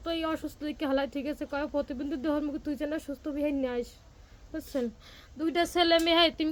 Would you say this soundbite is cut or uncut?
uncut